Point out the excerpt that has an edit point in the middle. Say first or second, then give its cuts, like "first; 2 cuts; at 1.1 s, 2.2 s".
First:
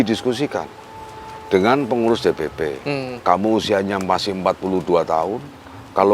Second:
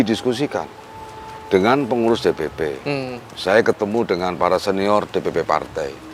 first; 1 cut; at 3.1 s